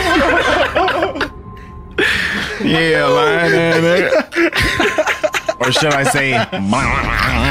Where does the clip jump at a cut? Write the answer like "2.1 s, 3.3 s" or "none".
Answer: none